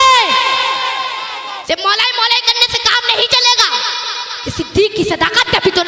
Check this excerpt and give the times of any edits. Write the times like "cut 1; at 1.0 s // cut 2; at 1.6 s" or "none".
cut 1; at 1.6 s